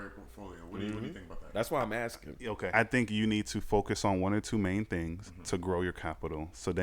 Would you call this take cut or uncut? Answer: cut